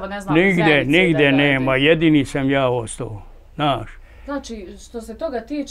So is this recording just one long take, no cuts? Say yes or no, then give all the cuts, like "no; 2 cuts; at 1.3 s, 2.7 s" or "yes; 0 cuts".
no; 1 cut; at 4.0 s